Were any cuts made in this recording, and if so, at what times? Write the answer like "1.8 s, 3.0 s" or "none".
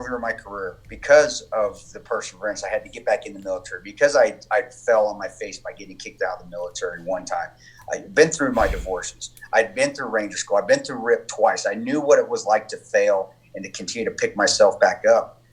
none